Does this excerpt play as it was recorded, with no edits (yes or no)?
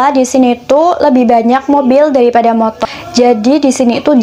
no